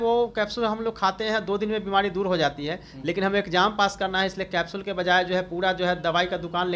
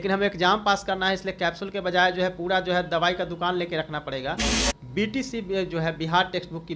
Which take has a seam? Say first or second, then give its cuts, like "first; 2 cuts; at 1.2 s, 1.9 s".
second; 1 cut; at 4.6 s